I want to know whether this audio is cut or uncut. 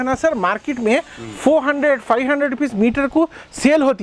uncut